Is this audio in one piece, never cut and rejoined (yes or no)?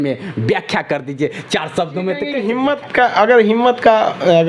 no